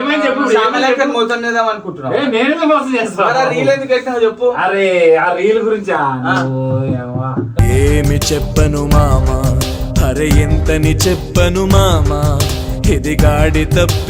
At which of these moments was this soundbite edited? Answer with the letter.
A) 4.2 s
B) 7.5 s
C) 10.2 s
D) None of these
D